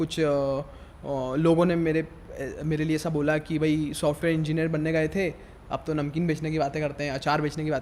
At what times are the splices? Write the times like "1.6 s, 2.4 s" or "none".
none